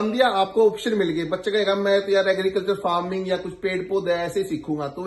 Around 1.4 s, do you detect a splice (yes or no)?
no